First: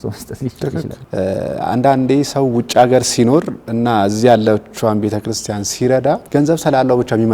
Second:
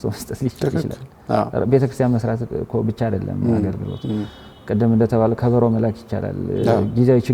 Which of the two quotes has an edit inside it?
first; 2 cuts; at 0.9 s, 6.2 s

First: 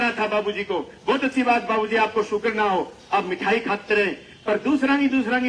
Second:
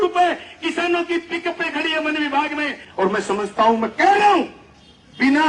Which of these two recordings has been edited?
second; 1 cut; at 2.8 s

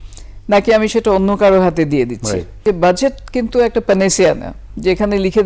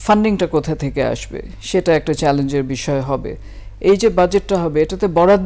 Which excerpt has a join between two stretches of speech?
first; 1 cut; at 2.5 s

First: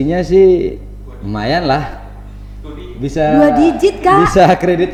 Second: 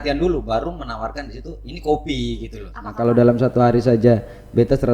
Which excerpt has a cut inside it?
second; 1 cut; at 2.8 s

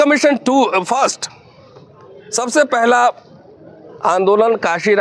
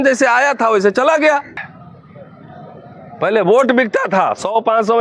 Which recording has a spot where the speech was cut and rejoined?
second; 1 cut; at 1.6 s

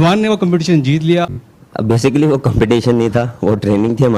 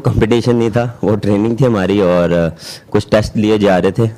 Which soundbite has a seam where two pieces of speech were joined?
first; 1 cut; at 1.2 s

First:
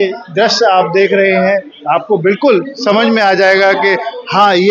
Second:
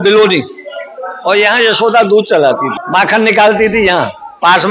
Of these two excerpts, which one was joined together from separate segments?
second; 1 cut; at 2.7 s

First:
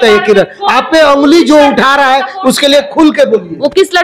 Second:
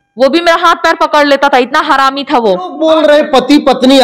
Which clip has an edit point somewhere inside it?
second; 1 cut; at 2.7 s

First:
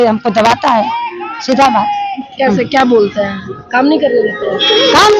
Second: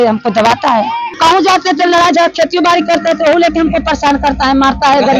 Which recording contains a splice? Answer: second; 1 cut; at 1.1 s

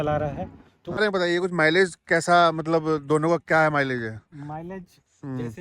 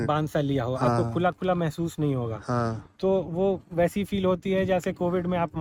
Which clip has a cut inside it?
first; 1 cut; at 1.0 s

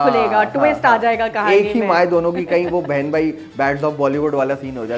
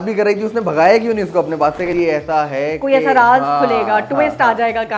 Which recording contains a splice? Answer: second; 1 cut; at 1.9 s

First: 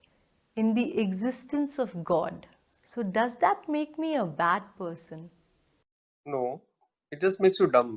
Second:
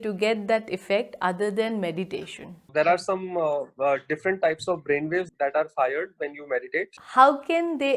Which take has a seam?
second; 3 cuts; at 2.7 s, 5.3 s, 7.0 s

